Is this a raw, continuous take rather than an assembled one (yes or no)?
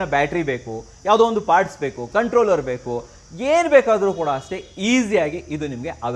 yes